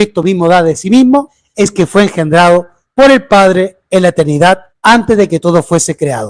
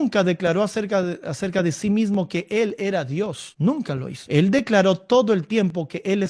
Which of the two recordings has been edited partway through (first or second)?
first